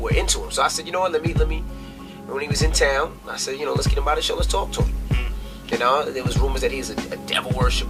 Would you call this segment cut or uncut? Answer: uncut